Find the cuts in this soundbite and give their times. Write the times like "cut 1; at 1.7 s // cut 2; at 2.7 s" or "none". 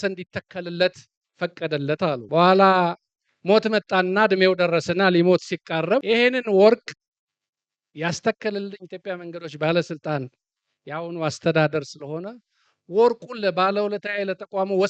cut 1; at 2.2 s // cut 2; at 6.0 s

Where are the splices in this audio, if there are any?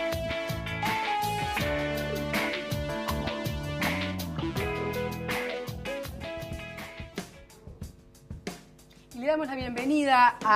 cut 1; at 6.1 s

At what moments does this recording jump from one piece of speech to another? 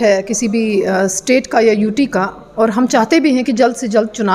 none

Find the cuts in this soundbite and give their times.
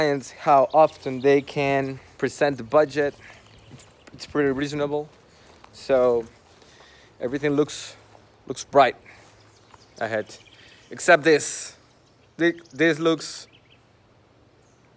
cut 1; at 2.1 s

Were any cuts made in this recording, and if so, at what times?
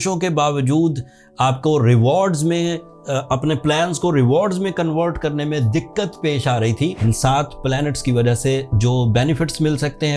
cut 1; at 7.0 s

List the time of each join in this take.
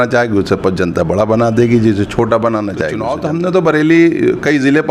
cut 1; at 3.1 s

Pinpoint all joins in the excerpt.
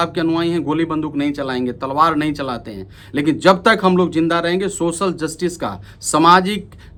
none

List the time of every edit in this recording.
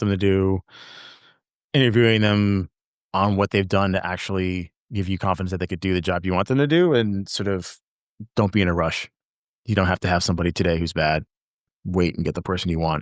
cut 1; at 11.6 s

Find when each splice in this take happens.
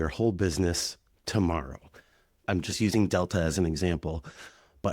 cut 1; at 2.4 s

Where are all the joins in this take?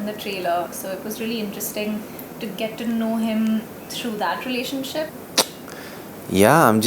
cut 1; at 5.1 s

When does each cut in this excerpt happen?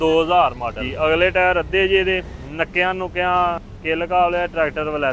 cut 1; at 0.9 s // cut 2; at 2.4 s // cut 3; at 3.7 s

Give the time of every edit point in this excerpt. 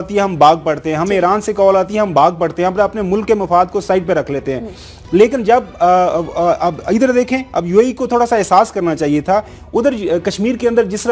cut 1; at 1.6 s

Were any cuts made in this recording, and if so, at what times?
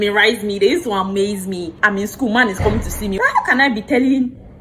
cut 1; at 1.7 s // cut 2; at 3.2 s

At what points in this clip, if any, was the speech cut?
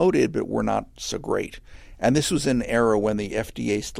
none

